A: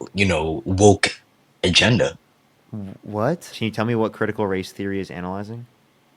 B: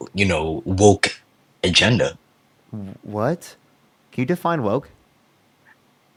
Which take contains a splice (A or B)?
A